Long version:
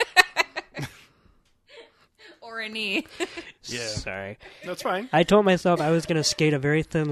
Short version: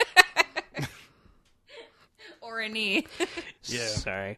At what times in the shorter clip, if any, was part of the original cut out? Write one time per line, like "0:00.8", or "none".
none

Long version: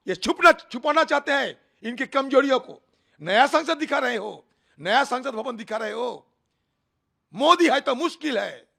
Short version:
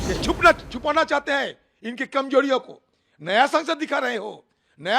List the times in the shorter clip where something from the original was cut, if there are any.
none

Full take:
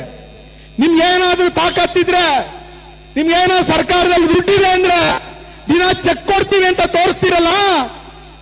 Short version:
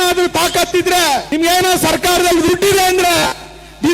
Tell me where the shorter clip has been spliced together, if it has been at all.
0:01.3

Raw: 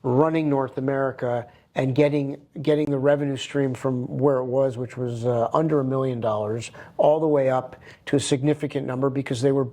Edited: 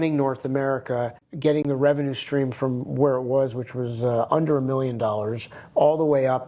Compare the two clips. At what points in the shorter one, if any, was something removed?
0:01.2

